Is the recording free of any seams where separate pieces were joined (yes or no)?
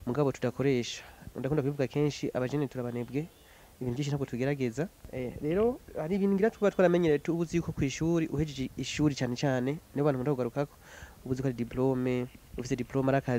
no